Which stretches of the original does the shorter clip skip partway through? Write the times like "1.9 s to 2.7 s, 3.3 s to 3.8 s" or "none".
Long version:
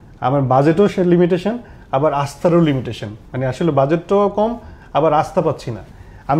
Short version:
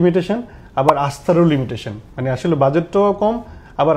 none